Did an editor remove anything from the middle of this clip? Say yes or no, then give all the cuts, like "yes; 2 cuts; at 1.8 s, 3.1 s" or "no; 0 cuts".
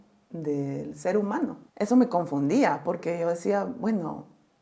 yes; 1 cut; at 1.6 s